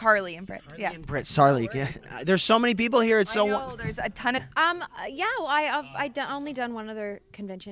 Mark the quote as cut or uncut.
uncut